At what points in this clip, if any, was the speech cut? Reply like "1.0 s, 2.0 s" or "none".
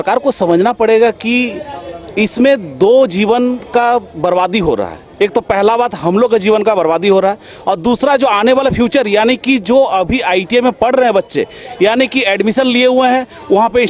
none